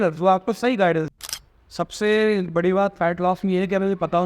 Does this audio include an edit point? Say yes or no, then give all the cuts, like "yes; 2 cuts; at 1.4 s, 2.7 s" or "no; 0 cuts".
yes; 1 cut; at 1.1 s